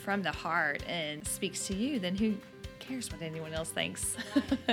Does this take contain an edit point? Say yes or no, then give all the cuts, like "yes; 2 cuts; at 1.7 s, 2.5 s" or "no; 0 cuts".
yes; 1 cut; at 1.2 s